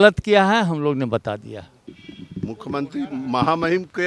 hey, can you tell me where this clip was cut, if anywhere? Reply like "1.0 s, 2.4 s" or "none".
1.8 s